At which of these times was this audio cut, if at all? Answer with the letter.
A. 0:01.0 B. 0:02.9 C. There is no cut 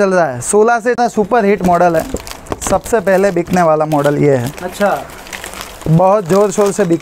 A